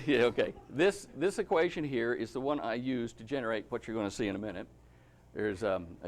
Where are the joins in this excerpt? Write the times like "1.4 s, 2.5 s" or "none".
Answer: 4.6 s

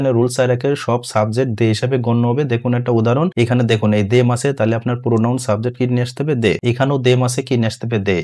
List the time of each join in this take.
3.3 s, 6.6 s

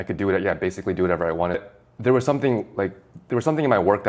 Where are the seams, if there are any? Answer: 1.6 s

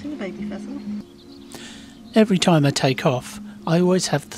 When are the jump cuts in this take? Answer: 1.0 s

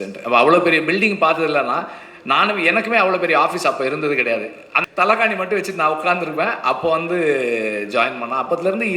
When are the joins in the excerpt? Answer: 4.7 s

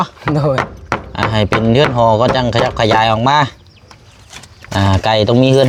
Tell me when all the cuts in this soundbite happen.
none

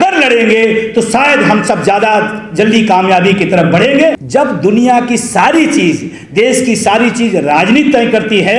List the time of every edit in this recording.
4.2 s

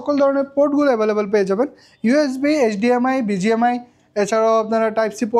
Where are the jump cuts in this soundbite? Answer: none

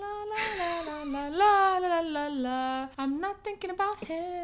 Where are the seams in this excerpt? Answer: 2.9 s

